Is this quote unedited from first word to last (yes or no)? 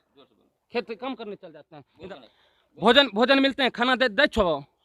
no